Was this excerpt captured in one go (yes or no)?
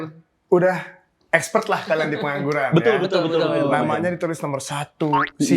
yes